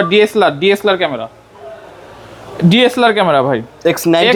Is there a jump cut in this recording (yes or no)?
no